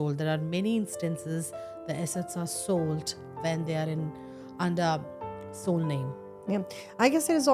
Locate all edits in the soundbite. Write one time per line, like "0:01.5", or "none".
none